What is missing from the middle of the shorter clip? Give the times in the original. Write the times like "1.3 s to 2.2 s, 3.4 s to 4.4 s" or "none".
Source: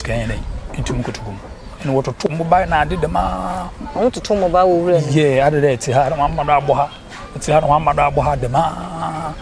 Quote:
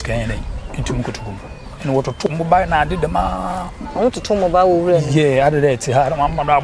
none